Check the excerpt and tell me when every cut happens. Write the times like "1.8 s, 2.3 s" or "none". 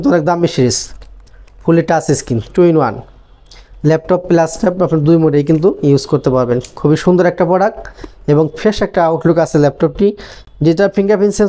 none